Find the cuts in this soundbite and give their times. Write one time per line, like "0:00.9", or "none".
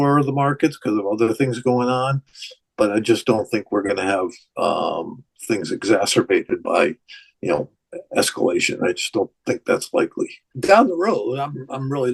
0:10.5